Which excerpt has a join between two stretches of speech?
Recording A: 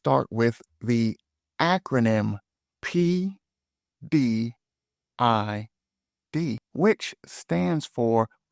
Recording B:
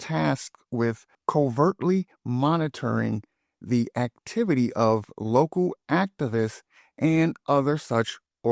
A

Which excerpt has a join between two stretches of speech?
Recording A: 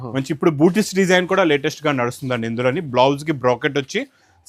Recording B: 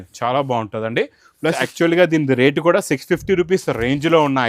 B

